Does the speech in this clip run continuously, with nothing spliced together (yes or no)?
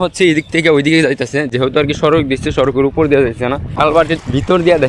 no